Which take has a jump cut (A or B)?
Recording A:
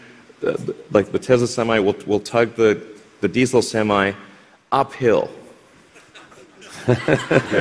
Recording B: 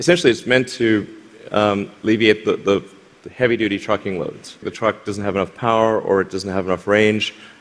B